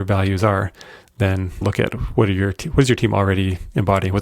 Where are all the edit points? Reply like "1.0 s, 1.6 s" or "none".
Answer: 1.6 s